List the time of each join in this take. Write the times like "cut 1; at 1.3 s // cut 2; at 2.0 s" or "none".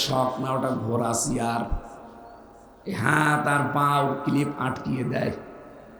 none